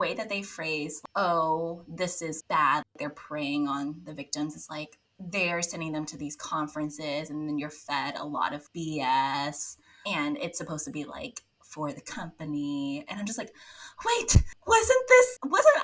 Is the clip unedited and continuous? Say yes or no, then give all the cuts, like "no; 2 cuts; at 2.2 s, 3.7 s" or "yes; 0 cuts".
yes; 0 cuts